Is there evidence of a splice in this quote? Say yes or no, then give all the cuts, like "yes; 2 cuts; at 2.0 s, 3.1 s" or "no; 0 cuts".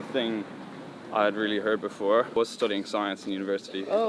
yes; 1 cut; at 2.3 s